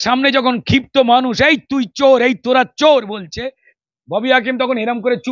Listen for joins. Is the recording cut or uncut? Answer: uncut